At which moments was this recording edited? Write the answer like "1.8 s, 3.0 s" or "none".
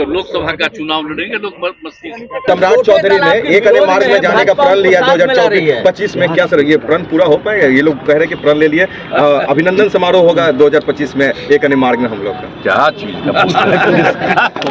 2.5 s